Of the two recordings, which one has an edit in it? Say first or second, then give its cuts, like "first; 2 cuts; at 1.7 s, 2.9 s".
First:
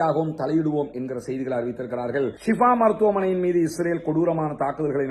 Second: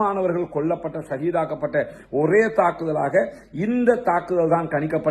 first; 1 cut; at 2.4 s